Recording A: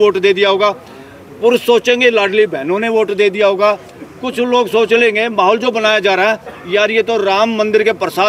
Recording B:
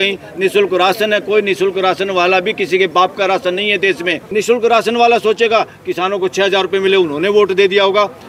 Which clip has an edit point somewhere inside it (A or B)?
B